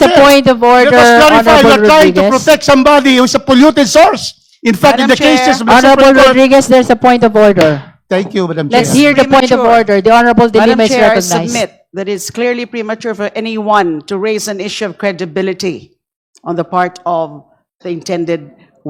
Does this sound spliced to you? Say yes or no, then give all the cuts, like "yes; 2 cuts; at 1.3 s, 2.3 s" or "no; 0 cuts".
no; 0 cuts